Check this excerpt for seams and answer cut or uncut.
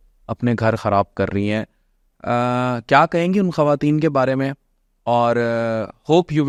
uncut